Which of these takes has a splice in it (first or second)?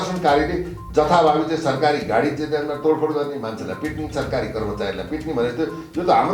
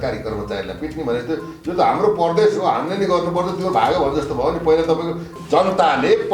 second